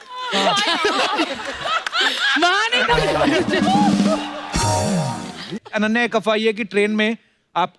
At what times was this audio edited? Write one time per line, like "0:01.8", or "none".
0:05.6